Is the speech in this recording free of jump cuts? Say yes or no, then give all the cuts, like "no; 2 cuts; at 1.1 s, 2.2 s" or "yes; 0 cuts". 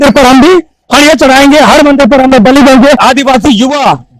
no; 1 cut; at 3.0 s